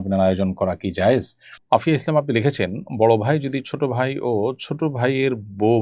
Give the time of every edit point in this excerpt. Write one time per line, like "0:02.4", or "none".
0:01.6